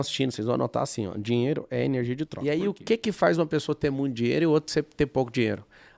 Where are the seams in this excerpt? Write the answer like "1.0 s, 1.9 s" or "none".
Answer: 2.3 s